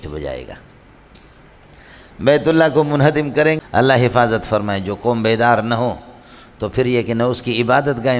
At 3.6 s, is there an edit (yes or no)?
yes